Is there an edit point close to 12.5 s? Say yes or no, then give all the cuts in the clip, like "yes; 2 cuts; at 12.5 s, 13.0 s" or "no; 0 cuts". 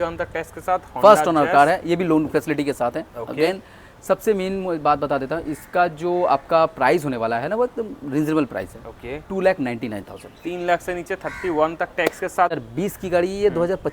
yes; 1 cut; at 12.5 s